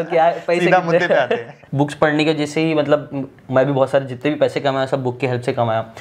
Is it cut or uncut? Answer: cut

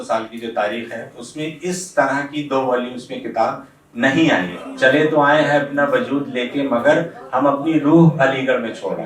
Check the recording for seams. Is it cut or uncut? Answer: cut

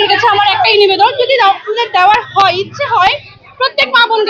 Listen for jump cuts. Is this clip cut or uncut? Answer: uncut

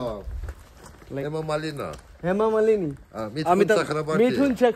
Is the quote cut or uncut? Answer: uncut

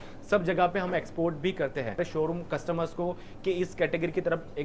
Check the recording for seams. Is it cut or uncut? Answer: cut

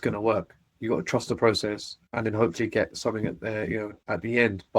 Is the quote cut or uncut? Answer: uncut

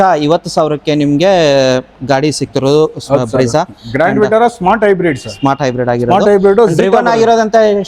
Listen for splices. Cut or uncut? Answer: uncut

